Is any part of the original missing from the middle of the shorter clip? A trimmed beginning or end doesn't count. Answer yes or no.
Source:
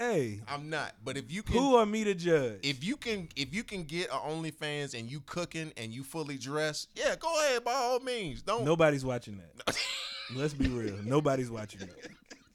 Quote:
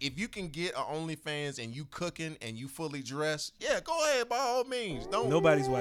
no